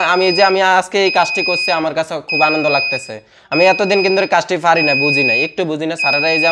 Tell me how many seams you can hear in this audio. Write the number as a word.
zero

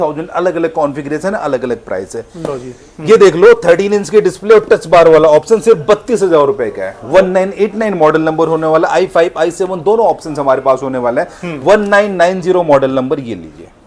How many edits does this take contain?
zero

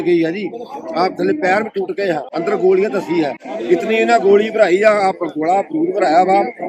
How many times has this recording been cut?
two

